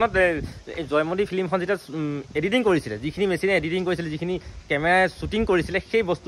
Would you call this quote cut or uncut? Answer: uncut